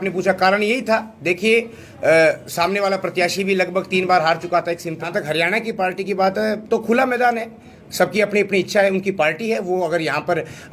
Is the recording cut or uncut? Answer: cut